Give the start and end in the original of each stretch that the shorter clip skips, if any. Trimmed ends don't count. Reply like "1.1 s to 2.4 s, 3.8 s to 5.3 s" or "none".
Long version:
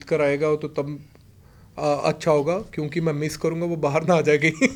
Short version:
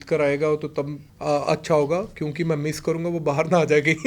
1.0 s to 1.6 s